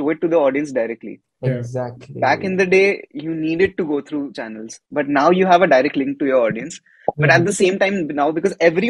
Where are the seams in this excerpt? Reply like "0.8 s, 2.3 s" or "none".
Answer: 4.7 s